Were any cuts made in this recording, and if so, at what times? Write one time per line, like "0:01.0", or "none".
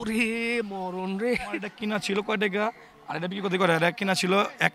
0:01.7